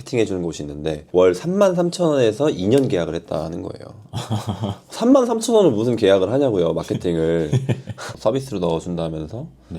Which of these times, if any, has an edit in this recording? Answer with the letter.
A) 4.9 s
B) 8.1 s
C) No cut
B